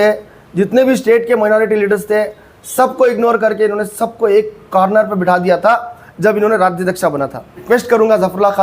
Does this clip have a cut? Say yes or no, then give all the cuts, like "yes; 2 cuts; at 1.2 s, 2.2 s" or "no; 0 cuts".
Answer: yes; 1 cut; at 7.6 s